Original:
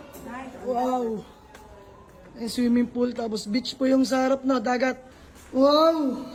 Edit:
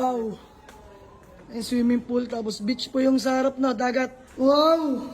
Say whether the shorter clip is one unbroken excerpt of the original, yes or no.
no